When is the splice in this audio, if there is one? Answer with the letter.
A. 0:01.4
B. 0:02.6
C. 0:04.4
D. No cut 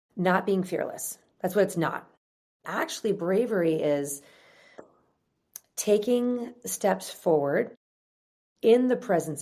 B